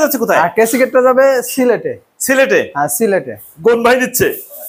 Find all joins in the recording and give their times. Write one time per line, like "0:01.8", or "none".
none